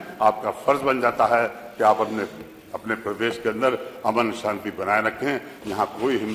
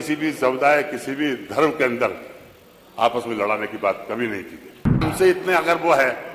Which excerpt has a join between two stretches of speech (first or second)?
second